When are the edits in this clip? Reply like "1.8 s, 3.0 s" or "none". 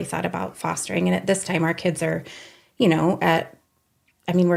none